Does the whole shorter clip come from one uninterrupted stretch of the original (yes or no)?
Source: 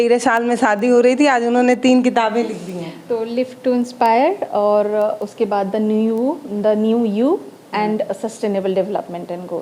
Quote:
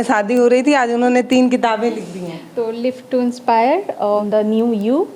no